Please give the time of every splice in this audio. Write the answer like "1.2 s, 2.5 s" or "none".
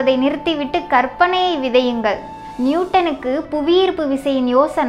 2.4 s